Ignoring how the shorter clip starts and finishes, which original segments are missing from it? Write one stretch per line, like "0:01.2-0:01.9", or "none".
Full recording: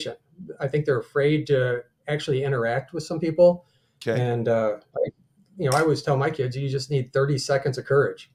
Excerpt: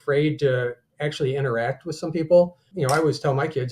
0:03.7-0:05.5